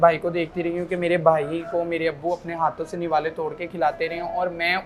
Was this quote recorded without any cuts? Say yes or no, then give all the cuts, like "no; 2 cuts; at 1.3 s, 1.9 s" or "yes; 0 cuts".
yes; 0 cuts